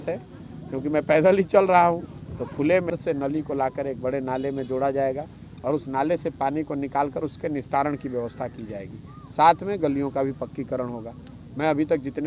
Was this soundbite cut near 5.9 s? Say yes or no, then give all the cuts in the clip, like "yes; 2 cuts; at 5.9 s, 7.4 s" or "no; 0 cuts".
no; 1 cut; at 2.9 s